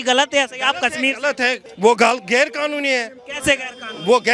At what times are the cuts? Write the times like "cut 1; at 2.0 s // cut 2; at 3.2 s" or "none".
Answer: cut 1; at 1.7 s